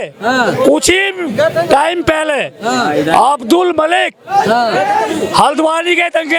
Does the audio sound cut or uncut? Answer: uncut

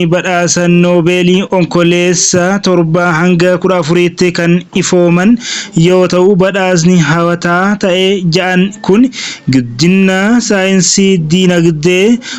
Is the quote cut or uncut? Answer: uncut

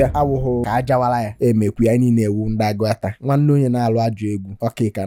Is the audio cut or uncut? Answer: uncut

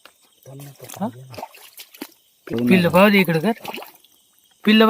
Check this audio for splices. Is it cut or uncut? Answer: cut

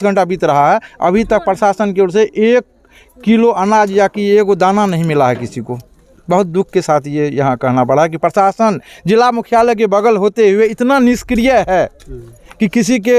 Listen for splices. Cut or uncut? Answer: uncut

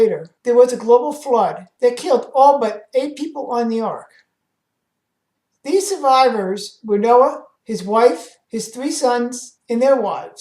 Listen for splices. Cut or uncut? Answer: uncut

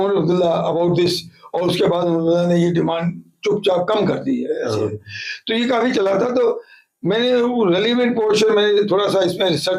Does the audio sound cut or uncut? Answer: uncut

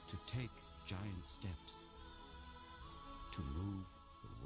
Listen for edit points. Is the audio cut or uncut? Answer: cut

